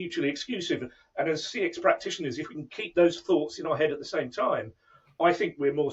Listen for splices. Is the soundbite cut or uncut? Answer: uncut